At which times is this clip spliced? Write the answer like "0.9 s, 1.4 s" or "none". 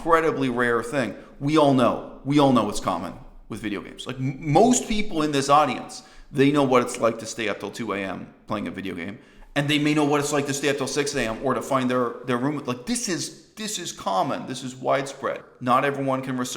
15.4 s